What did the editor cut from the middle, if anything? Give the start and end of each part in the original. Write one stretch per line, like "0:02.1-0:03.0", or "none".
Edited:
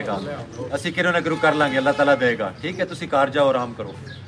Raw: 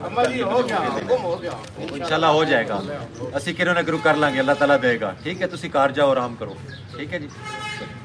none